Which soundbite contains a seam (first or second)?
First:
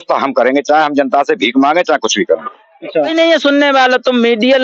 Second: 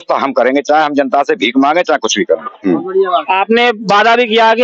first